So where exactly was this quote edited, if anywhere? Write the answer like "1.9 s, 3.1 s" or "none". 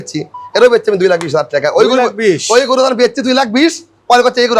none